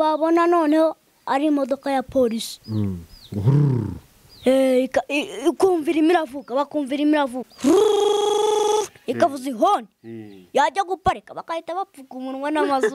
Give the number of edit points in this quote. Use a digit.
1